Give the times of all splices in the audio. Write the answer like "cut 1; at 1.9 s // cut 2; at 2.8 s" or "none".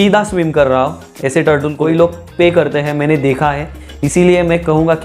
cut 1; at 1.7 s